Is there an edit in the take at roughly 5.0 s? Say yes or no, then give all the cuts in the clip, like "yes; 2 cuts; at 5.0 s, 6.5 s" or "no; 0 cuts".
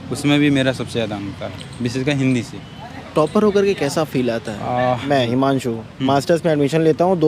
yes; 1 cut; at 5.0 s